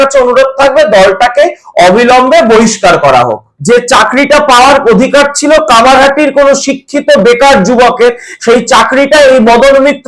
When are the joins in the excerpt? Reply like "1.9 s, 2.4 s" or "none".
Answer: 3.5 s